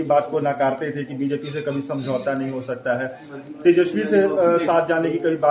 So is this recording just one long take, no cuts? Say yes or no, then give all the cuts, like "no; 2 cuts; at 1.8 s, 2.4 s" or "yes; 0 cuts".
yes; 0 cuts